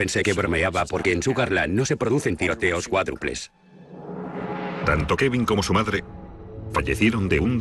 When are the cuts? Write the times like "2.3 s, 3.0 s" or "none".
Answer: none